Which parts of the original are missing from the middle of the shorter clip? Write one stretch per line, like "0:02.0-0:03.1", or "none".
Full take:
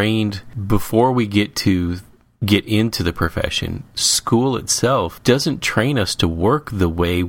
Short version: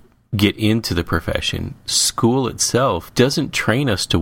none